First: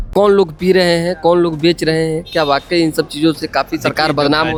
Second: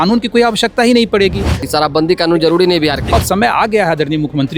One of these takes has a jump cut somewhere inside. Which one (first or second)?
second